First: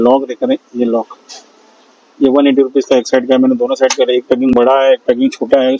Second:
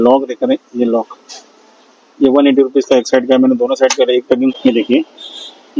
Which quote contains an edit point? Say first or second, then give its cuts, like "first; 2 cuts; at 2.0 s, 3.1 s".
second; 1 cut; at 4.5 s